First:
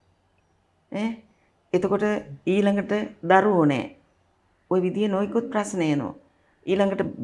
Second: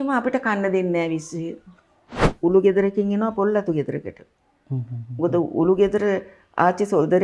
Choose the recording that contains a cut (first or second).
second